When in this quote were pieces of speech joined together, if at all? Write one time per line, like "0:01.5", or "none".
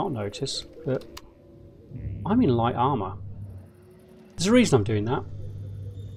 0:04.3